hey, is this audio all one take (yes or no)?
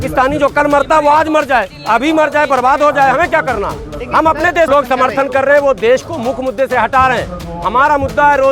no